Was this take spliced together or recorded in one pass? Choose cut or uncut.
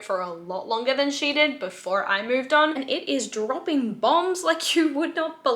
cut